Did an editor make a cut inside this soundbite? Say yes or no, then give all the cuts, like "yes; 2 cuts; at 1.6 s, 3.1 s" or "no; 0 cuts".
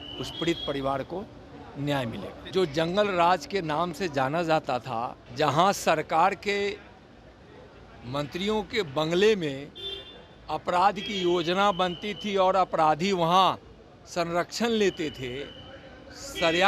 yes; 2 cuts; at 2.4 s, 5.2 s